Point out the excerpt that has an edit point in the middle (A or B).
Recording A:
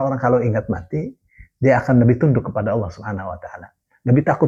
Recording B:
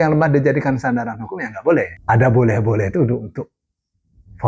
B